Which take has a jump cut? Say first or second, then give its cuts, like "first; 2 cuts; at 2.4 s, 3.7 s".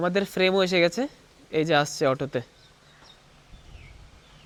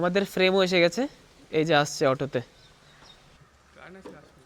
second; 1 cut; at 3.4 s